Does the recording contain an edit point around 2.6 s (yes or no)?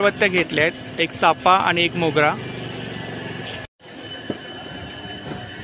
no